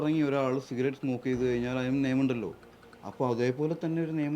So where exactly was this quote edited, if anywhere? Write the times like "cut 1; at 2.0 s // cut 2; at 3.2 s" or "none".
none